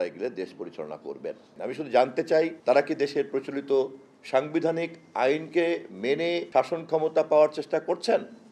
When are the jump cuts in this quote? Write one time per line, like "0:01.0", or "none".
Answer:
0:01.5
0:02.6
0:06.4